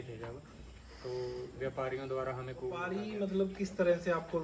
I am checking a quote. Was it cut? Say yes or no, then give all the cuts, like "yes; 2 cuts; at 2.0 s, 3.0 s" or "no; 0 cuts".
yes; 1 cut; at 2.9 s